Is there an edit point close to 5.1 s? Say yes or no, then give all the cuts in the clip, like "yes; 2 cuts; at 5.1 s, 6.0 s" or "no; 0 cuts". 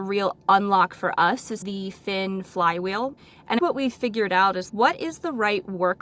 no; 2 cuts; at 1.6 s, 3.4 s